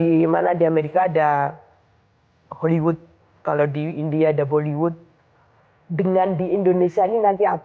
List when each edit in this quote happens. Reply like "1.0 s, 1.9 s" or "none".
none